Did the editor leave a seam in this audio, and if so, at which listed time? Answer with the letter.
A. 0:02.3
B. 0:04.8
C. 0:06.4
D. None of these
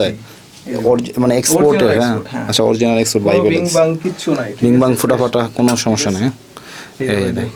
D